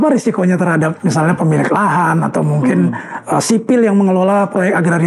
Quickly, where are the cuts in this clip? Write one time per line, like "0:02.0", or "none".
none